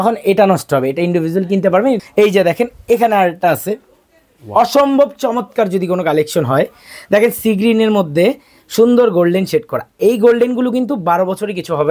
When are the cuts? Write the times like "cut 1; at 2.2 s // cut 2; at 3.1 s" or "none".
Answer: cut 1; at 2.0 s

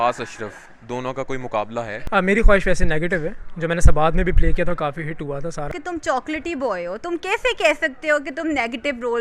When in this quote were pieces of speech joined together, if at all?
cut 1; at 2.0 s // cut 2; at 5.8 s

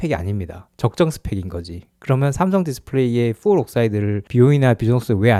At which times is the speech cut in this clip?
none

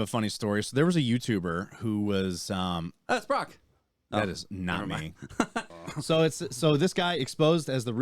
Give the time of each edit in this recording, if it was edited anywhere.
cut 1; at 5.7 s

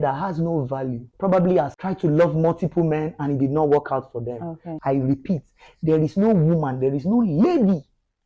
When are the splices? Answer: cut 1; at 1.0 s // cut 2; at 1.8 s // cut 3; at 4.6 s

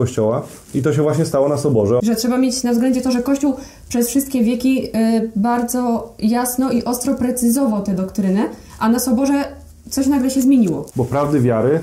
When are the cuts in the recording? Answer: cut 1; at 2.0 s // cut 2; at 10.9 s

